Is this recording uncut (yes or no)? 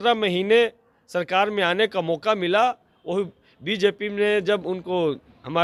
yes